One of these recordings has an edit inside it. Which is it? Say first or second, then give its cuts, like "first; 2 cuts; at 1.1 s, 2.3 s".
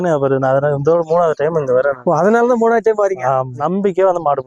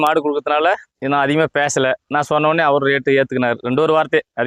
first; 2 cuts; at 2.0 s, 3.6 s